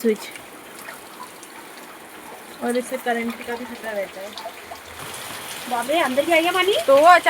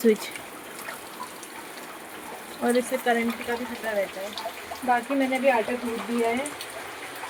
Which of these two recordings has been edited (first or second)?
first